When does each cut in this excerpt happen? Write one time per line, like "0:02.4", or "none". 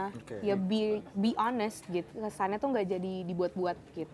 0:02.1